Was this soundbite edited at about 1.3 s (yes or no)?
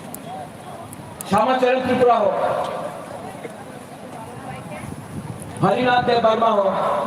no